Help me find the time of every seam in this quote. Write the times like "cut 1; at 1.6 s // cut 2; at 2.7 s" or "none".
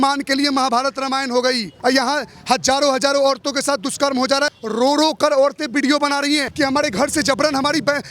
cut 1; at 1.7 s // cut 2; at 4.5 s // cut 3; at 6.5 s